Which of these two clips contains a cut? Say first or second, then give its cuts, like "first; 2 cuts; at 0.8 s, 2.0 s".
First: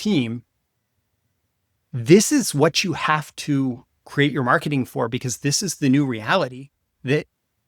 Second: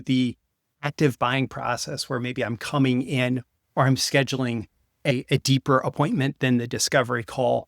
second; 1 cut; at 5.1 s